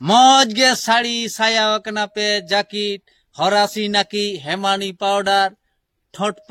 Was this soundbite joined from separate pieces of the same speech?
no; 0 cuts

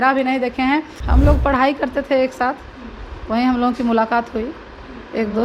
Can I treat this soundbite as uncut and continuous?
no; 1 cut; at 1.0 s

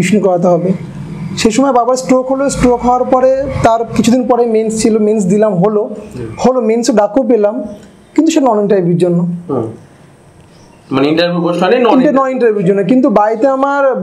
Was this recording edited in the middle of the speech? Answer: no; 0 cuts

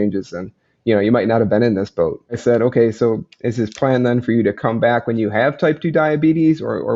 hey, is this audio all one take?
no; 1 cut; at 2.4 s

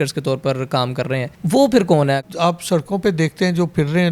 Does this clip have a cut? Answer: yes; 2 cuts; at 1.3 s, 2.2 s

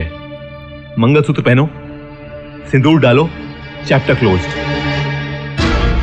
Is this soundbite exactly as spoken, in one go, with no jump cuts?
yes; 0 cuts

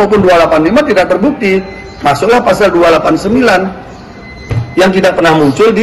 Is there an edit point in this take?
no; 0 cuts

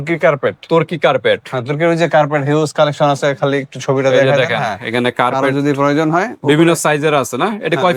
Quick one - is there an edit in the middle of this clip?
no; 0 cuts

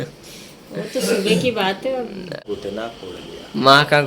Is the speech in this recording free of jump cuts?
no; 1 cut; at 2.3 s

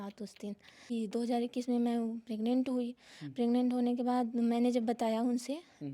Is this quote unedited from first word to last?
no; 1 cut; at 0.9 s

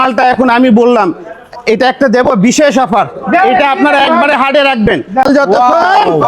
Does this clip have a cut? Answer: yes; 1 cut; at 5.2 s

